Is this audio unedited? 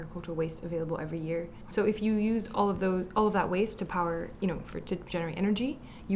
no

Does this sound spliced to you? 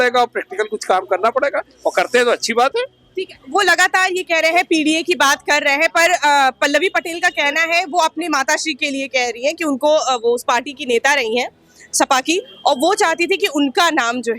no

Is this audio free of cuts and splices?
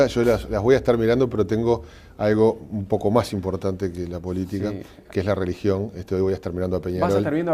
no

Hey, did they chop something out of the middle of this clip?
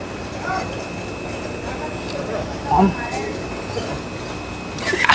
no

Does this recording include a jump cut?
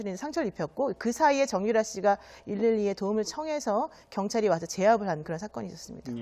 yes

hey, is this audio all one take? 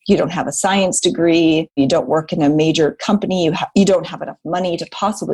no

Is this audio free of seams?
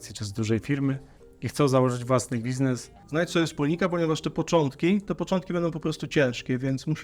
no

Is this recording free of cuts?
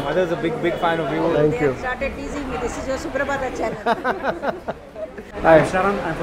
no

